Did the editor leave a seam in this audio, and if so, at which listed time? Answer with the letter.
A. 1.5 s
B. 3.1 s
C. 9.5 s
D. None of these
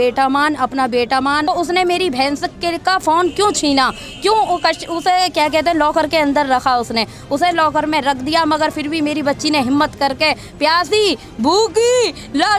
A